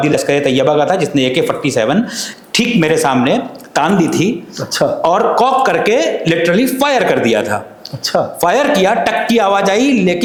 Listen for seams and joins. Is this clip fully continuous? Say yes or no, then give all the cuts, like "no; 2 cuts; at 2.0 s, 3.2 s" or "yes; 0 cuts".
yes; 0 cuts